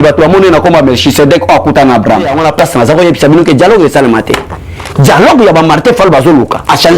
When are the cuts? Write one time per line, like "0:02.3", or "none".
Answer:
0:02.3